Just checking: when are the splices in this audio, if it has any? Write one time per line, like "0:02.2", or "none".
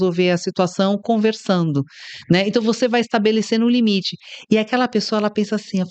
none